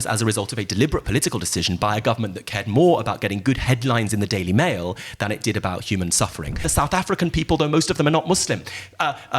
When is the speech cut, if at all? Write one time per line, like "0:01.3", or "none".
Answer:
0:06.7